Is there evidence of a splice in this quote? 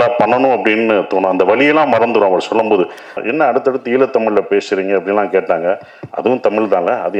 yes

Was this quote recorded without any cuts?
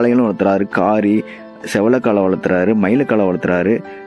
yes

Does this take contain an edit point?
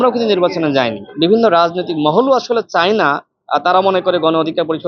yes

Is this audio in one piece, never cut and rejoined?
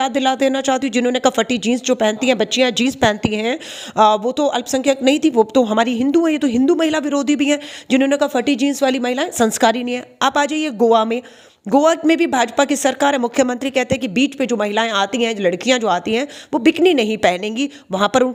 yes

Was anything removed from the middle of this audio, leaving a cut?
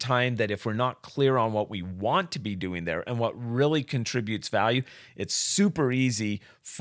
no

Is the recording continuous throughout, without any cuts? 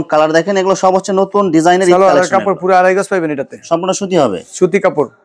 yes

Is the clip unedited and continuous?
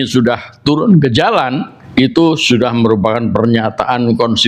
no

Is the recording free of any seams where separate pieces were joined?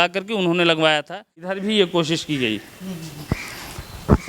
no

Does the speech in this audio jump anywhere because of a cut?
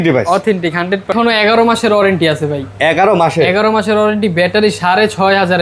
yes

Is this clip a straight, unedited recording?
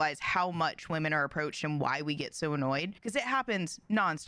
no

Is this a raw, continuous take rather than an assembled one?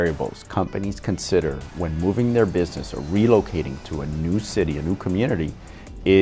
yes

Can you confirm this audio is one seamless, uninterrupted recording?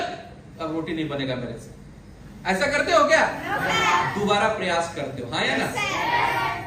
yes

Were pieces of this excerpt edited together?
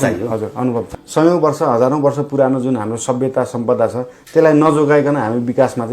yes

